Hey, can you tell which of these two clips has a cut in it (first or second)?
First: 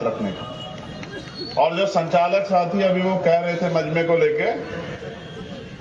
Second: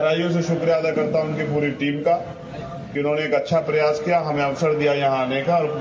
second